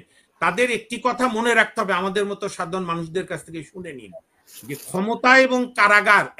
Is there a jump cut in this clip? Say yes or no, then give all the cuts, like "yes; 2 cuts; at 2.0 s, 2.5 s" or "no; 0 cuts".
no; 0 cuts